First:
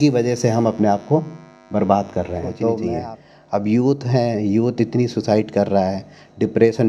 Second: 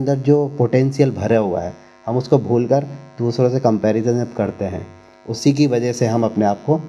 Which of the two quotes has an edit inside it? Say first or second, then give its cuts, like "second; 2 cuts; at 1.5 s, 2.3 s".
first; 1 cut; at 2.9 s